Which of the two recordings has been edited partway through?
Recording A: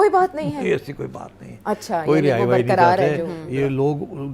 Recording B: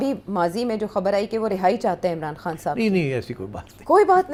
A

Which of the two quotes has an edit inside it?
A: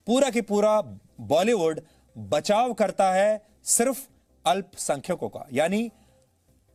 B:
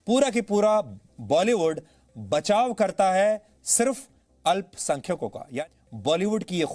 B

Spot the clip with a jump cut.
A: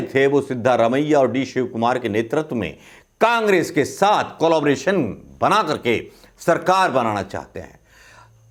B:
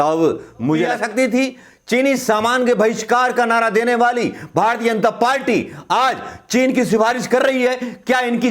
B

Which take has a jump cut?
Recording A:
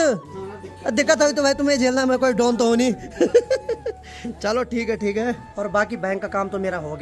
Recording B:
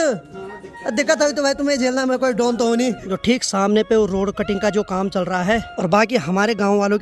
B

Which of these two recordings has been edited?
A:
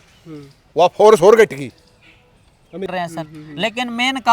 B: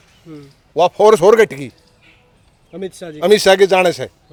A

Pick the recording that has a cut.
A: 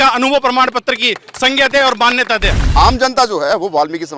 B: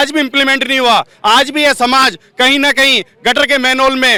A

